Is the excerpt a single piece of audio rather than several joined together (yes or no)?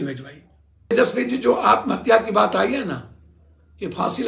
no